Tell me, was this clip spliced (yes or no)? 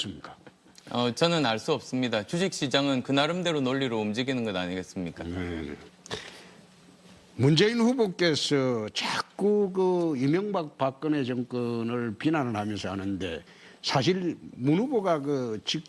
no